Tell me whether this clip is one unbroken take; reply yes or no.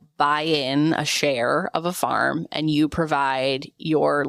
yes